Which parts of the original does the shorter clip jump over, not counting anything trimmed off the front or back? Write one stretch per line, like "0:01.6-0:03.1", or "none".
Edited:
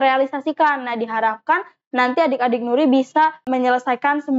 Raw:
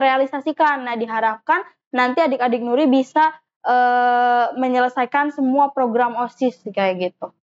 0:03.4-0:04.5